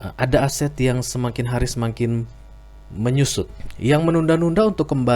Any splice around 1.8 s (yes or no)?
no